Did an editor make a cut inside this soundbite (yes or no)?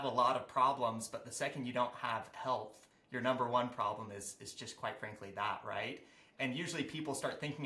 no